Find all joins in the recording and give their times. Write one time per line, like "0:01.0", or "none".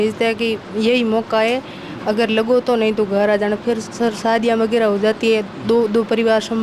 none